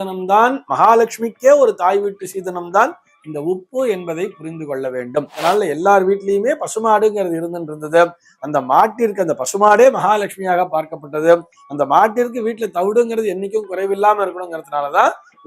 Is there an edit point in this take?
yes; 1 cut; at 5.4 s

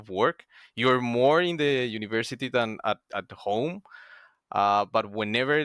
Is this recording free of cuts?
yes; 0 cuts

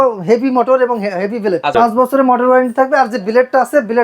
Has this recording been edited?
yes; 1 cut; at 1.7 s

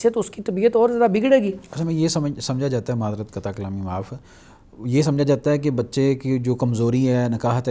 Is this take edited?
no; 0 cuts

